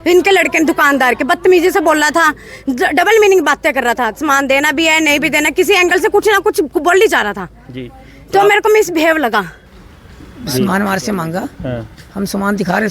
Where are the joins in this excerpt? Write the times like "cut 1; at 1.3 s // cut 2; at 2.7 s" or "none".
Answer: cut 1; at 9.6 s